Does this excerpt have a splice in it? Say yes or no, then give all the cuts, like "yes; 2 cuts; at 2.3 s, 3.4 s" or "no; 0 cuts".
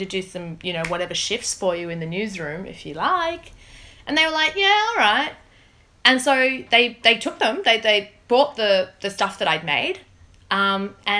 no; 0 cuts